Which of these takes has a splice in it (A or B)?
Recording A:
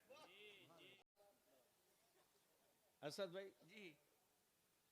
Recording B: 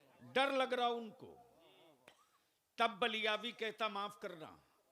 A